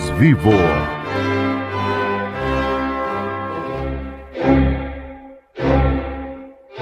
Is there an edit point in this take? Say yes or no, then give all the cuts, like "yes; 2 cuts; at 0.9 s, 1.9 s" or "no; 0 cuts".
yes; 2 cuts; at 0.8 s, 4.2 s